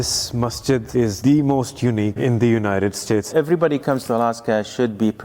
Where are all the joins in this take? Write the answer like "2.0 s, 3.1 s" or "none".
0.9 s, 2.2 s, 3.3 s